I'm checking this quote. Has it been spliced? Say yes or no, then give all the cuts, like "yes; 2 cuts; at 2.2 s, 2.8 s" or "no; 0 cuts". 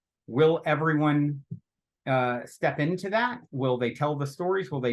no; 0 cuts